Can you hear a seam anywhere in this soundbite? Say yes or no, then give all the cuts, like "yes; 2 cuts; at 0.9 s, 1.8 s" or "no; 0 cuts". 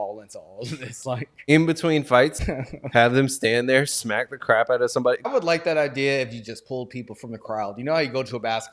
yes; 3 cuts; at 1.4 s, 2.5 s, 5.3 s